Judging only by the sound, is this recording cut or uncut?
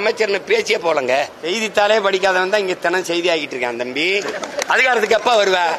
cut